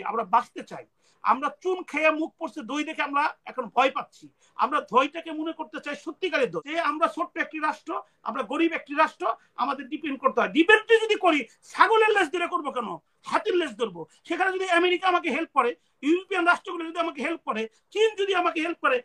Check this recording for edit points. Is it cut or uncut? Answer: cut